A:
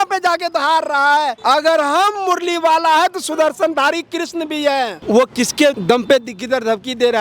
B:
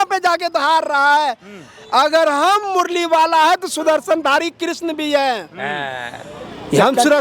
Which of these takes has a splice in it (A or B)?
A